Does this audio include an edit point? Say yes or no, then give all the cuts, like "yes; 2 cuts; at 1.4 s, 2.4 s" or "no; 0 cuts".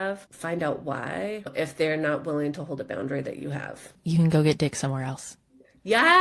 yes; 1 cut; at 1.5 s